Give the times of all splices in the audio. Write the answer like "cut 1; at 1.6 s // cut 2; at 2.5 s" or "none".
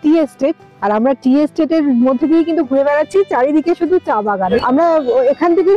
cut 1; at 4.5 s